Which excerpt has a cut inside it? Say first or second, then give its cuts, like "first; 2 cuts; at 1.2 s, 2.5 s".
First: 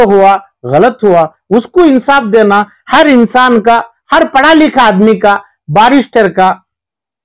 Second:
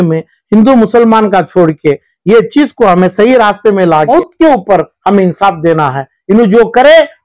second; 1 cut; at 4.1 s